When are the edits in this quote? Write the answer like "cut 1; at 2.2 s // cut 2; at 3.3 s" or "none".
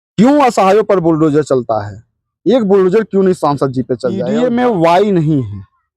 cut 1; at 4.2 s